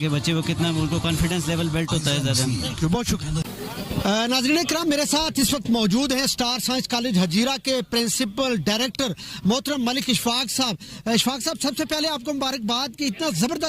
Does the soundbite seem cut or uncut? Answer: uncut